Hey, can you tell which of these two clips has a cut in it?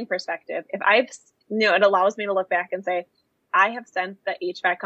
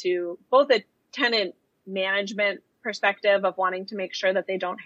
second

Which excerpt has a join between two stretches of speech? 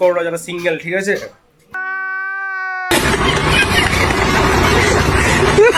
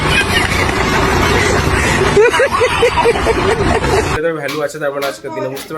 second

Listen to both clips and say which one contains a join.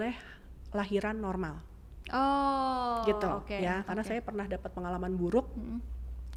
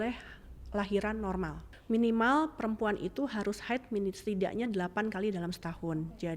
second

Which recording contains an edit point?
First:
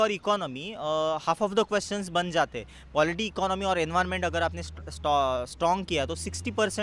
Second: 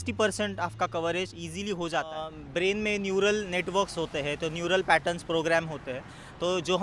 second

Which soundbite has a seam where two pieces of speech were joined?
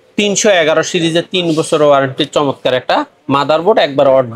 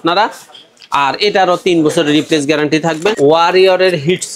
second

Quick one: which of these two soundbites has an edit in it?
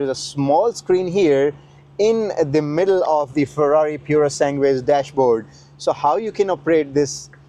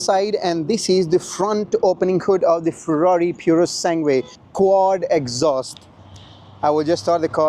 second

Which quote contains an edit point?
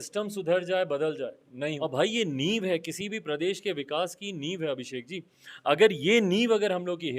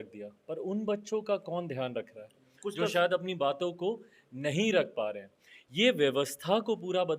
first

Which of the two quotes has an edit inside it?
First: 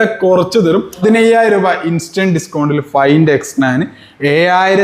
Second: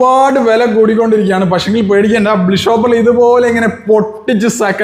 first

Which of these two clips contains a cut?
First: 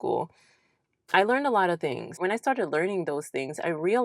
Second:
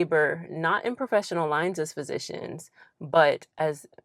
first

